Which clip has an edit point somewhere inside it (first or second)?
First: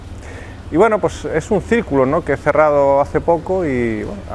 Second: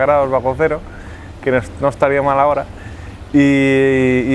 first